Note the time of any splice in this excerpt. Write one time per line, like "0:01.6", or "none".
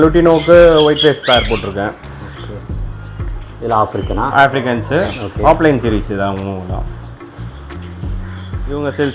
none